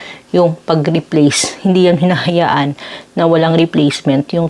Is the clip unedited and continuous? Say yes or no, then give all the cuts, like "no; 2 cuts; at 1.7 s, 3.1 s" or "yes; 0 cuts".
yes; 0 cuts